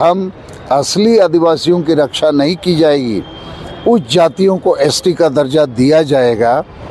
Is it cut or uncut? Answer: uncut